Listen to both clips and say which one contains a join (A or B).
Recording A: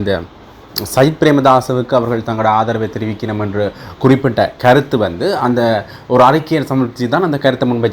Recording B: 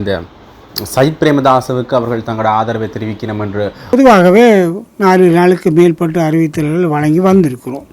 B